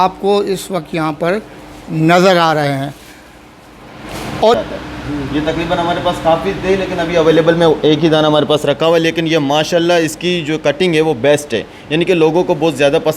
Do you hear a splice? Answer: yes; 1 cut; at 4.5 s

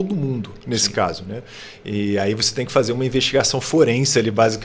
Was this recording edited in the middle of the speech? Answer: no; 0 cuts

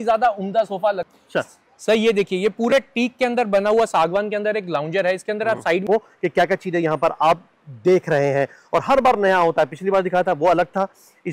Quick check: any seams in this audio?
yes; 2 cuts; at 1.0 s, 5.9 s

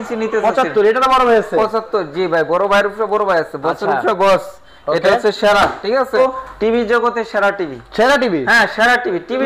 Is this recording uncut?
no; 1 cut; at 6.2 s

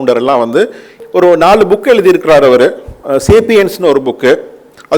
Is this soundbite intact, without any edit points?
no; 1 cut; at 0.9 s

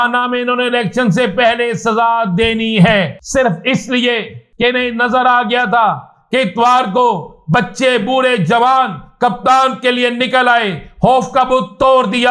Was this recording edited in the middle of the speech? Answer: yes; 2 cuts; at 3.2 s, 4.4 s

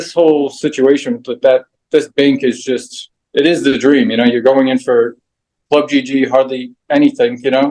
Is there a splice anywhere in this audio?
no; 0 cuts

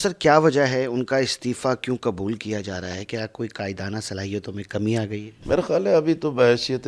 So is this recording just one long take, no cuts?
yes; 0 cuts

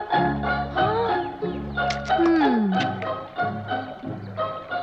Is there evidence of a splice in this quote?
no; 0 cuts

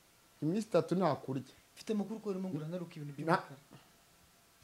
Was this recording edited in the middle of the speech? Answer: no; 0 cuts

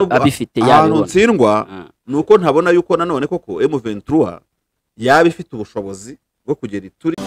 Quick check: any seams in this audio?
no; 0 cuts

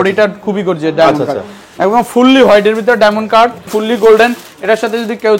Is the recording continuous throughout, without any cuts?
no; 1 cut; at 3.6 s

